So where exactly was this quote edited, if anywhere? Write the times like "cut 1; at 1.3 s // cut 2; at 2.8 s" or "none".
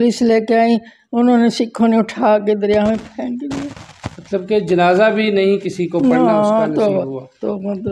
none